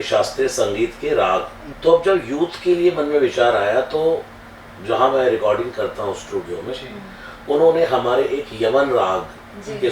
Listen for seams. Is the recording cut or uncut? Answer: cut